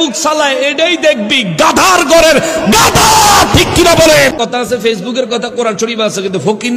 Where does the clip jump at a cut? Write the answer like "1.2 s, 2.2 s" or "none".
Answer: 4.3 s